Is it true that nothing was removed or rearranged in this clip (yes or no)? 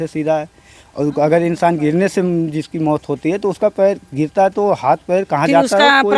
yes